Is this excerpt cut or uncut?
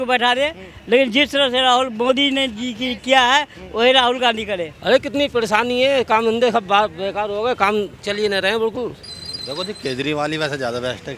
cut